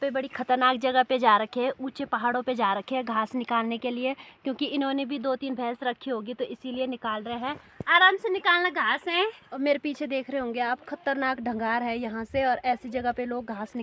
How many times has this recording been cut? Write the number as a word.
zero